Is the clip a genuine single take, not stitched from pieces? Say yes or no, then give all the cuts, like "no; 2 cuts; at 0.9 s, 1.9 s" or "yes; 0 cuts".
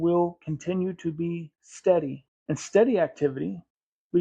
no; 1 cut; at 2.3 s